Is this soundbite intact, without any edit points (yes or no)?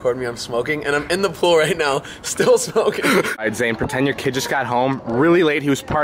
no